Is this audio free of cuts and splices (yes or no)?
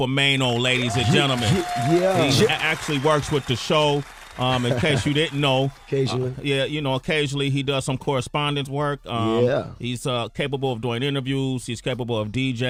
yes